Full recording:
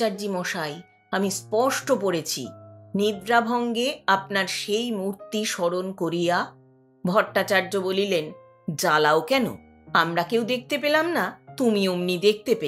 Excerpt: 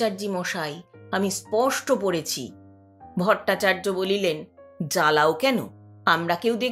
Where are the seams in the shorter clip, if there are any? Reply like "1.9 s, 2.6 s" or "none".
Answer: 2.7 s